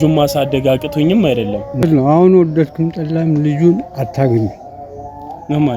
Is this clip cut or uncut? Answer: cut